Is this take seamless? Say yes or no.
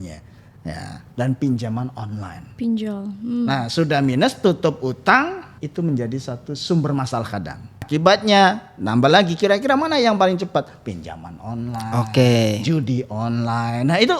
no